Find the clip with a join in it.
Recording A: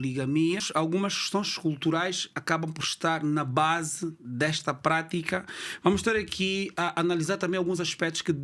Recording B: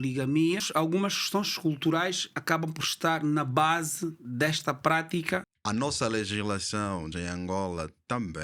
B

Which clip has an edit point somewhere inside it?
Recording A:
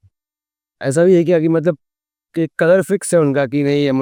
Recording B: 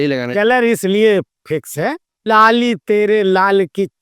B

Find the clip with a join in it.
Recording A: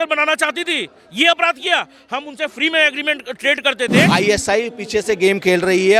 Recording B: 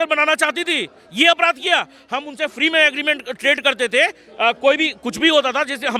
A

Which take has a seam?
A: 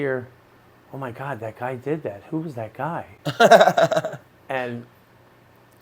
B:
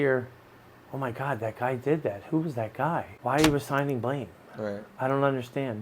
B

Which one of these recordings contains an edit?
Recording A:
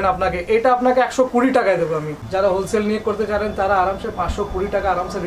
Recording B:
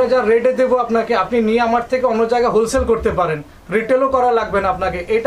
A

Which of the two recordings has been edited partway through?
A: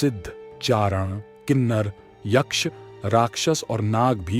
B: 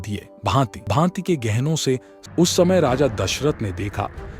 B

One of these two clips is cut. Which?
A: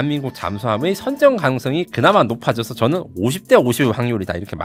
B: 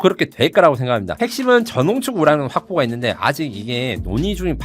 B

